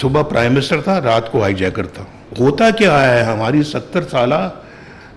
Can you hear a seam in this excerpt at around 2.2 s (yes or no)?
yes